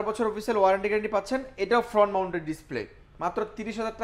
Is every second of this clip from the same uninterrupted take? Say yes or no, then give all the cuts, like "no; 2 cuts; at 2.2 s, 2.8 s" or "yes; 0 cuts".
yes; 0 cuts